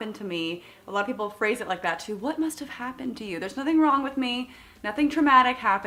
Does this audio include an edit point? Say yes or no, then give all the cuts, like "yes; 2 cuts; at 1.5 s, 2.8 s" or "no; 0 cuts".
no; 0 cuts